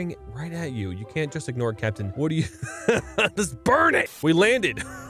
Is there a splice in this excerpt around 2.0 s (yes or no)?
yes